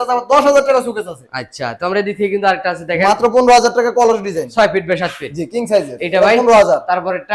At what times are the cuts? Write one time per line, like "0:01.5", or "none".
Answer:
none